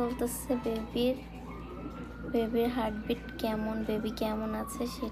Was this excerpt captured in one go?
yes; 0 cuts

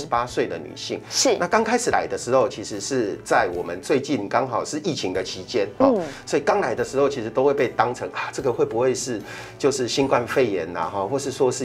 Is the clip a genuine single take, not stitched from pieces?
yes; 0 cuts

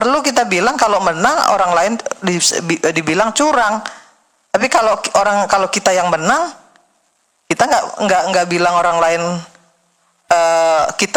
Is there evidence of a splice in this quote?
no; 0 cuts

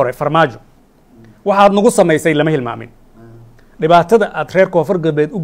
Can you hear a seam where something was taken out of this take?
no; 0 cuts

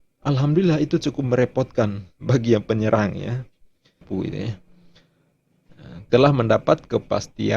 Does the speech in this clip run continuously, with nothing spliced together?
no; 1 cut; at 4.0 s

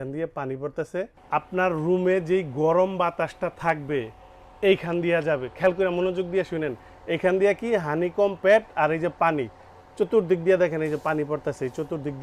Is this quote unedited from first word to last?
yes; 0 cuts

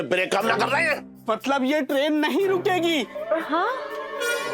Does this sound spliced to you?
yes; 1 cut; at 1.1 s

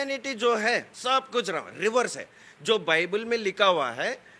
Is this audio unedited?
no; 1 cut; at 0.9 s

